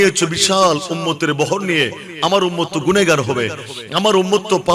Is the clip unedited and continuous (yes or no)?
yes